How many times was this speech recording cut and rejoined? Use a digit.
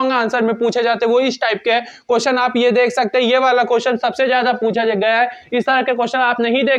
0